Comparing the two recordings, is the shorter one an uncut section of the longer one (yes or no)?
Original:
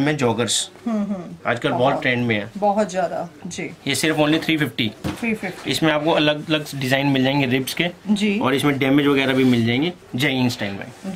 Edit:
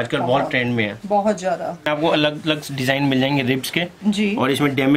no